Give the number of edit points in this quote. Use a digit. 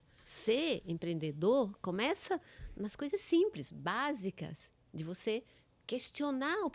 0